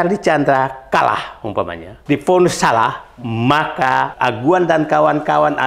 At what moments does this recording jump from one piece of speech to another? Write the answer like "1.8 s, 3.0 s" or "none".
1.9 s, 4.1 s